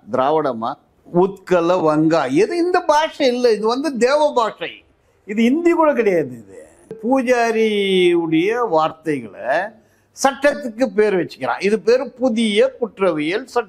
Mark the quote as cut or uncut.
cut